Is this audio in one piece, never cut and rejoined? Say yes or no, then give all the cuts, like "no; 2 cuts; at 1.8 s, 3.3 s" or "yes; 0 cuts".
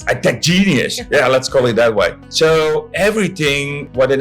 no; 1 cut; at 2.2 s